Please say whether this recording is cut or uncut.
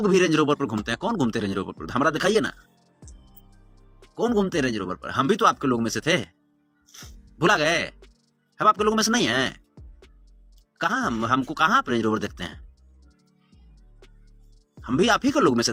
uncut